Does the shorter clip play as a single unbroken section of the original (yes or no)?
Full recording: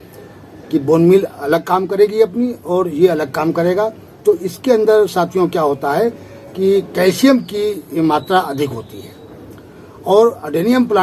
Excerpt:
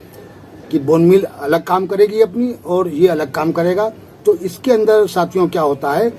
yes